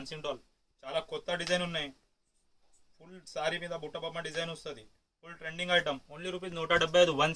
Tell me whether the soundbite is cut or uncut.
uncut